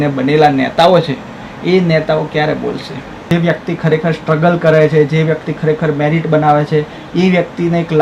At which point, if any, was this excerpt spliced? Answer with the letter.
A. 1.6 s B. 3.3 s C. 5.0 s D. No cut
B